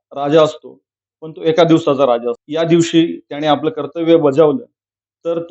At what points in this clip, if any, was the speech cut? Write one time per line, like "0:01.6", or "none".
0:02.4